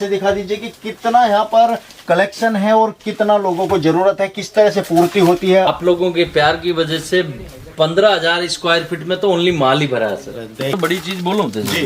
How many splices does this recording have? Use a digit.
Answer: 2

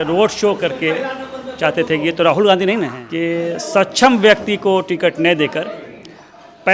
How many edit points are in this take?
1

